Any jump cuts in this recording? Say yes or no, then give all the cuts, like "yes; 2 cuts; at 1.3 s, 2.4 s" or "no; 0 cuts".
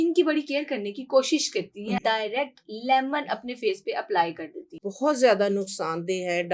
yes; 2 cuts; at 2.0 s, 4.8 s